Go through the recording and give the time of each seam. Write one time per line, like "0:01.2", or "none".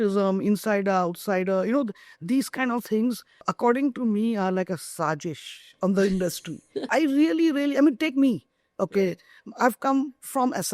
0:03.5
0:06.9